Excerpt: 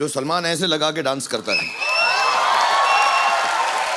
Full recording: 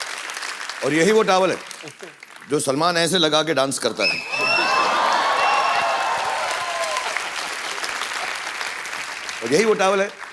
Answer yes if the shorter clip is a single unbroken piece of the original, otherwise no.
yes